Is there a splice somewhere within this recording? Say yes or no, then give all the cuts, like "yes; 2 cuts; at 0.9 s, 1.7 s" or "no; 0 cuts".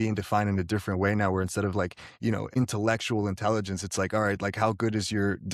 no; 0 cuts